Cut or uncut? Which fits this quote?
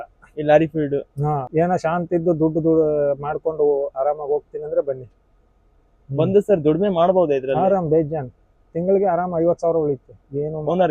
cut